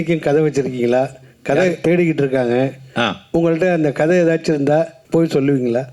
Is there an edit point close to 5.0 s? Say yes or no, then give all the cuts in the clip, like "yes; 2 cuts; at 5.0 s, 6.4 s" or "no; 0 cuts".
yes; 1 cut; at 5.0 s